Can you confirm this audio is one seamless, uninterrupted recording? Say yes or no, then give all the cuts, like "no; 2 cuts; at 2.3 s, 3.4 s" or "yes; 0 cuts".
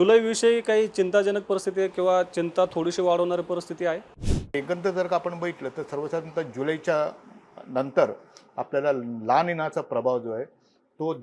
no; 1 cut; at 4.5 s